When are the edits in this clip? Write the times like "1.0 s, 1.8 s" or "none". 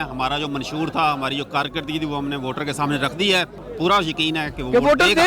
3.6 s